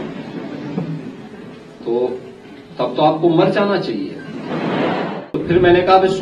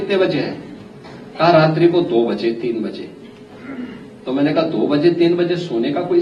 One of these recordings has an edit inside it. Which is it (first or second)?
first